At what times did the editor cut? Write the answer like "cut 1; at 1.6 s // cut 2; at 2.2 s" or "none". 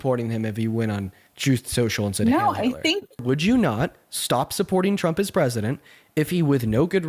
cut 1; at 3.2 s